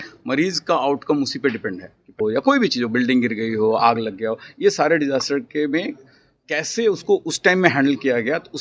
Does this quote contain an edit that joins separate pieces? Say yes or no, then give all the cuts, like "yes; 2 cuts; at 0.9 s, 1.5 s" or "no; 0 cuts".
yes; 1 cut; at 2.2 s